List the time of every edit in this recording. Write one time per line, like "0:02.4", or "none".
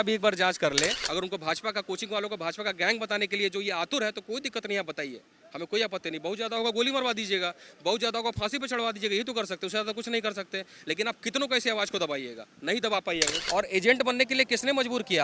0:01.0
0:13.4